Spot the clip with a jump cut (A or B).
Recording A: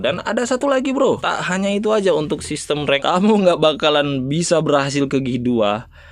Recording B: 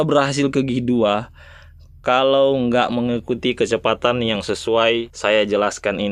A